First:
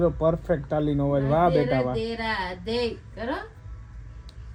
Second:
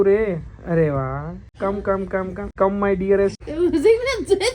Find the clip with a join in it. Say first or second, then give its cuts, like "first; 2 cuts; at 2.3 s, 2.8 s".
second; 3 cuts; at 1.4 s, 2.5 s, 3.4 s